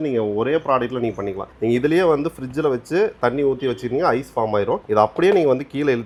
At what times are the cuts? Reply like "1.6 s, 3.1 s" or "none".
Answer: none